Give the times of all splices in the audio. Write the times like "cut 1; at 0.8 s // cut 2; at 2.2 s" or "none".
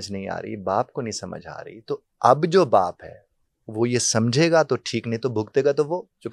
none